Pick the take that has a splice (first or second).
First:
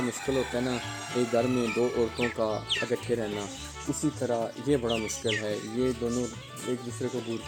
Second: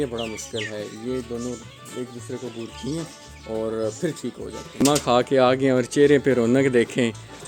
second